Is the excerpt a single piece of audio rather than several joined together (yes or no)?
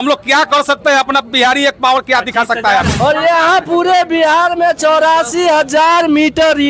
no